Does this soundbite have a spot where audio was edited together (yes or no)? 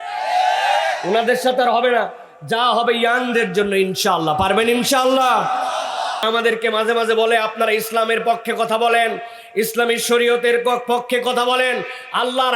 yes